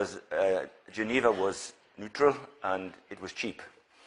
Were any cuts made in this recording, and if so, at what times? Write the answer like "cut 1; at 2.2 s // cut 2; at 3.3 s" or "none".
none